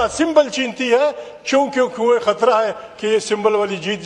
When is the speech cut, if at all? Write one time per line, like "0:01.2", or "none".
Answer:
none